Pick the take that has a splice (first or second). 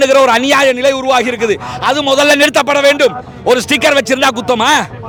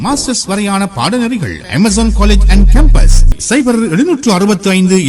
second